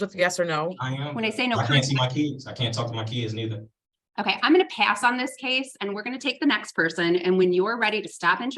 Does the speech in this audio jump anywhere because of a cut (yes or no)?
yes